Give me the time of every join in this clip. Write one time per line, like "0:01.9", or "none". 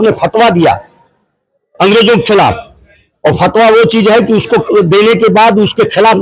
none